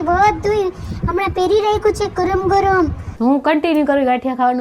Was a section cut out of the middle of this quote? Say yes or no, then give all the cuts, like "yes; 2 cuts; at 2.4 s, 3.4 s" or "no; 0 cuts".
yes; 1 cut; at 3.1 s